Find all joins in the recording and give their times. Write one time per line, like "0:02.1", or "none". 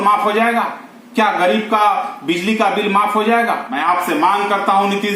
0:03.7